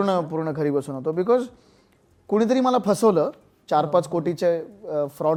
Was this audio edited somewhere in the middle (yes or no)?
no